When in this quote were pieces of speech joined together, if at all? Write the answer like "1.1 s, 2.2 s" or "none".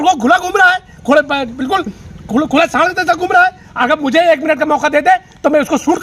none